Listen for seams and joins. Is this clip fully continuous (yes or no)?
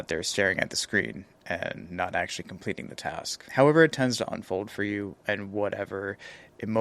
yes